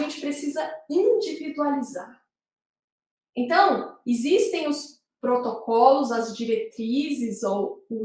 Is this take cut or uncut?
uncut